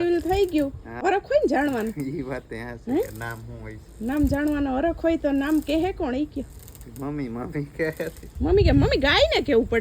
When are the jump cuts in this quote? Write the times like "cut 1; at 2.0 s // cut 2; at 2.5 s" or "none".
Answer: cut 1; at 1.0 s